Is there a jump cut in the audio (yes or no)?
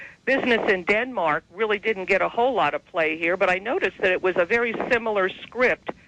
no